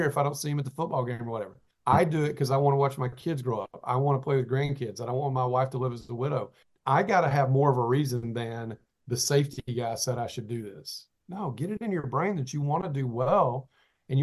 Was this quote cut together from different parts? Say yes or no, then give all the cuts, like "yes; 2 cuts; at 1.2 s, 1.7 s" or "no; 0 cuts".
no; 0 cuts